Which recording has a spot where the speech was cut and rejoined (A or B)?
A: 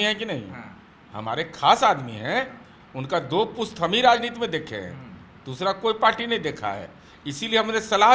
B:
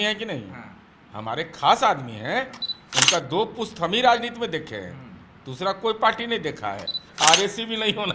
B